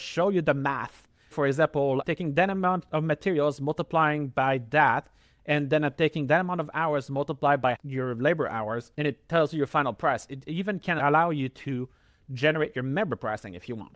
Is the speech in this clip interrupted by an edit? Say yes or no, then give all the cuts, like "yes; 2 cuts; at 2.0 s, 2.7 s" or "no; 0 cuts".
yes; 4 cuts; at 1.3 s, 7.8 s, 8.9 s, 11.0 s